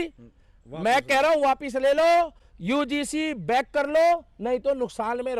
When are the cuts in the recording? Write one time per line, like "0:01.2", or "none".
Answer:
none